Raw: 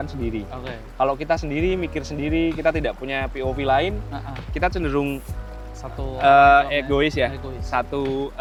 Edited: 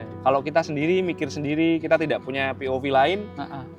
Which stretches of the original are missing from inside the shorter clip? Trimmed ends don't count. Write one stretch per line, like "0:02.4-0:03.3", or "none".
none